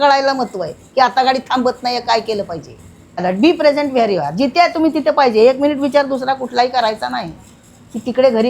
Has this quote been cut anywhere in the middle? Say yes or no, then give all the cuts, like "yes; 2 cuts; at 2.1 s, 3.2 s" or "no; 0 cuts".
yes; 1 cut; at 3.2 s